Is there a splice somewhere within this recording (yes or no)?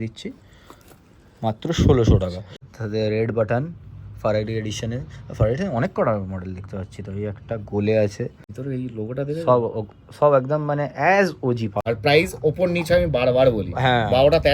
yes